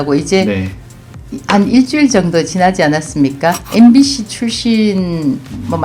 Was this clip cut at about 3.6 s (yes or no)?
yes